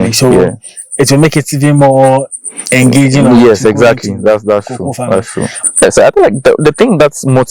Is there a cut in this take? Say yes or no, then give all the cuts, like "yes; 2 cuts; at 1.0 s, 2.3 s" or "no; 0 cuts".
yes; 1 cut; at 5.6 s